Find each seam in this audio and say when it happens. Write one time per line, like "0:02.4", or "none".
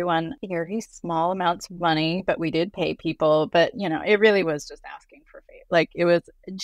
none